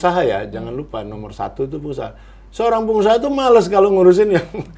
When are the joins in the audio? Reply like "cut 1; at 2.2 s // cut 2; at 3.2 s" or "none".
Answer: none